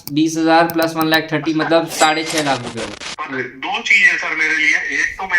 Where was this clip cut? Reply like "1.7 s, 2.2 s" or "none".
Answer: 2.9 s

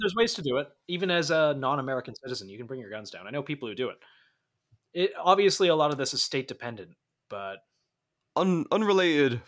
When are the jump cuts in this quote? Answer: none

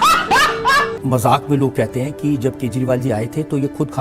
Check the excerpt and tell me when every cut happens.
1.0 s

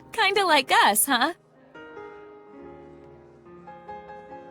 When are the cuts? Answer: 1.6 s

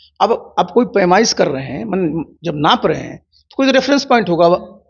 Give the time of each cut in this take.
none

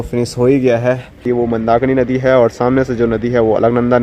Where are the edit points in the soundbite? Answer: 1.3 s

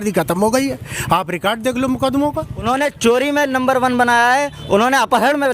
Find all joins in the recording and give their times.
2.7 s

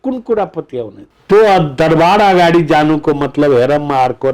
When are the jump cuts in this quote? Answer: 1.1 s

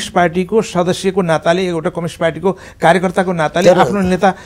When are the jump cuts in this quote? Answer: none

